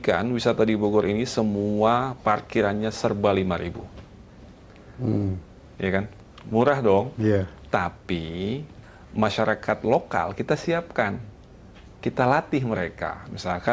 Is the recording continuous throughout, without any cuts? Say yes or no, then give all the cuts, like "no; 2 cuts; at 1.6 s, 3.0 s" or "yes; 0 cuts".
yes; 0 cuts